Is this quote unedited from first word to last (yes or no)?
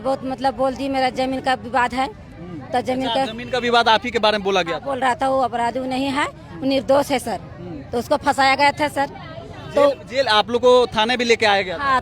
yes